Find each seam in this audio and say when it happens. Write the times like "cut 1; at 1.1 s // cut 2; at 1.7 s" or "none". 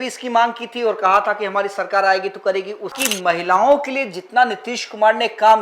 cut 1; at 2.9 s